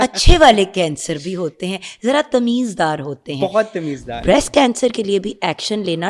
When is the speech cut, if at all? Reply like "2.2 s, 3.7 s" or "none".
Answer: 4.2 s

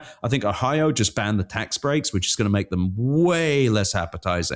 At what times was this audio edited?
none

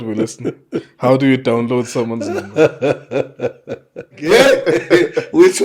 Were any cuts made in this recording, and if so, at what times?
4.2 s

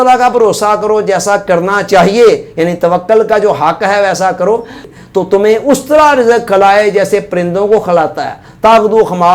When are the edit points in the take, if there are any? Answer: 4.8 s

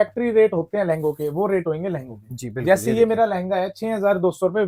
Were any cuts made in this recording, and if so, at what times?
none

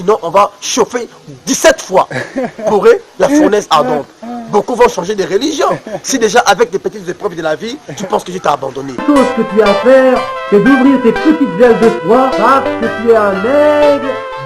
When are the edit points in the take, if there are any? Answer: 8.9 s

